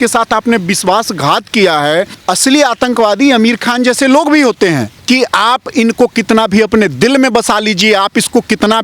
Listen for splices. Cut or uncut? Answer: cut